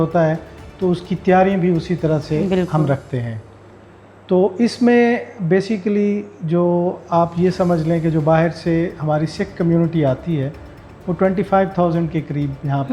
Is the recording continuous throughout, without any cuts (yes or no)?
yes